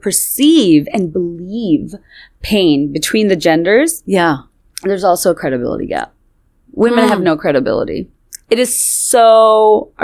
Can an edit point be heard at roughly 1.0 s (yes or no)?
no